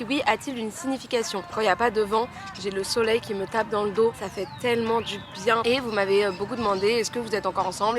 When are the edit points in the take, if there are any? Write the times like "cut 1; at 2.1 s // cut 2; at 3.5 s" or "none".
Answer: cut 1; at 1.5 s // cut 2; at 5.6 s

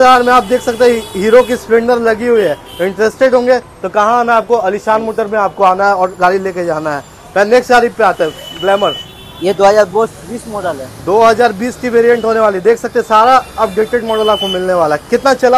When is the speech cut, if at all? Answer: none

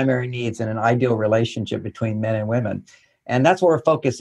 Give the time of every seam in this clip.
none

